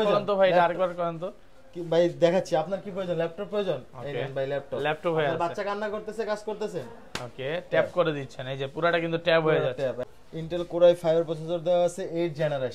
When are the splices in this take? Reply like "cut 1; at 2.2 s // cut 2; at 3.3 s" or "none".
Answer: cut 1; at 10.1 s

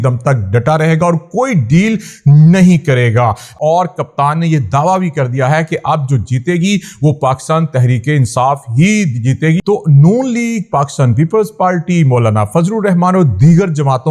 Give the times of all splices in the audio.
cut 1; at 3.6 s // cut 2; at 9.6 s

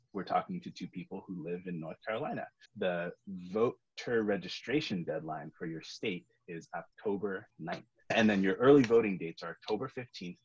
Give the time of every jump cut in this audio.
cut 1; at 2.6 s

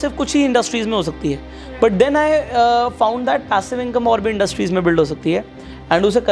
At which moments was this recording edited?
none

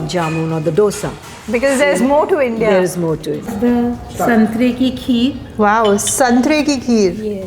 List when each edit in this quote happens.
none

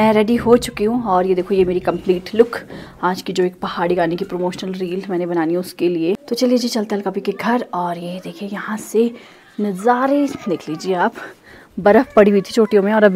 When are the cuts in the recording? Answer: none

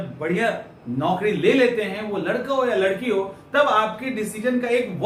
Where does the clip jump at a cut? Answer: none

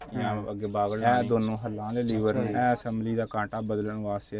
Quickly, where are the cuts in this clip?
cut 1; at 1.0 s // cut 2; at 2.4 s

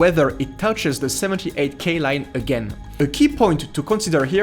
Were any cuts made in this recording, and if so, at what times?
cut 1; at 2.8 s

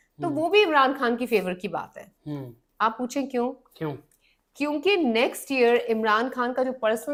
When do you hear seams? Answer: none

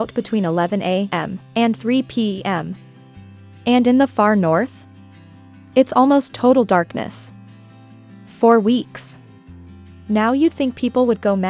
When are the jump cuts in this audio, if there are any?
cut 1; at 1.2 s

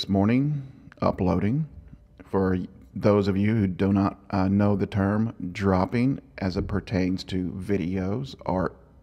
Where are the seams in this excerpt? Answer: cut 1; at 4.9 s

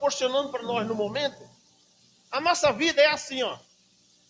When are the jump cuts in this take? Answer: none

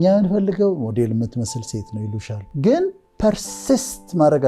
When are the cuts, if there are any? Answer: cut 1; at 2.4 s

